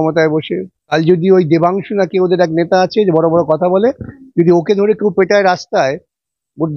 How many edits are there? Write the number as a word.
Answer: one